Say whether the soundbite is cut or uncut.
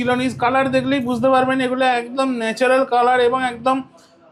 uncut